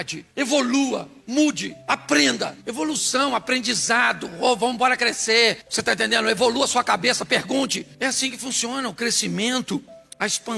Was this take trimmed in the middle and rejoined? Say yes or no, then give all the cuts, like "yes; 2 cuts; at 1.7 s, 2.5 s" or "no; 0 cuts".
no; 0 cuts